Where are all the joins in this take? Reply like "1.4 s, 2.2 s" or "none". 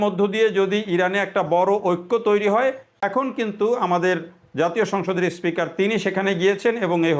2.9 s